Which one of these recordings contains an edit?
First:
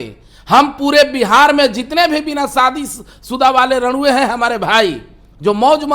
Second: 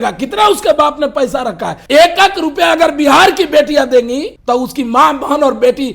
second; 2 cuts; at 1.7 s, 4.3 s

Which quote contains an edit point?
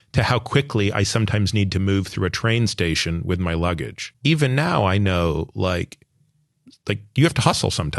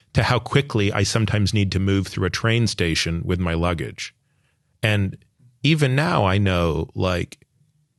first; 1 cut; at 4.0 s

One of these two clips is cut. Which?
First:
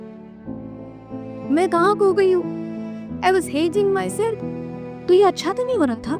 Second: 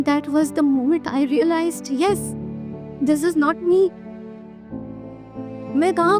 first; 1 cut; at 4.4 s

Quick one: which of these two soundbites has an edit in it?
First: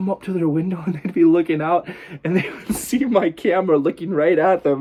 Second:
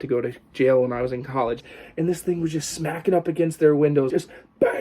second; 2 cuts; at 1.6 s, 4.1 s

